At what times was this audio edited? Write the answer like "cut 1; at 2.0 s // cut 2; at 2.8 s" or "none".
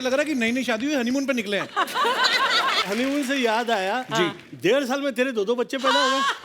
cut 1; at 2.8 s